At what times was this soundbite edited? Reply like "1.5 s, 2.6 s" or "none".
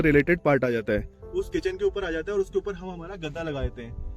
1.2 s